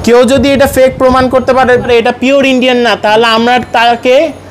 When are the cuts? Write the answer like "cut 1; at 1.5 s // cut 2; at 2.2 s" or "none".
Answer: cut 1; at 1.9 s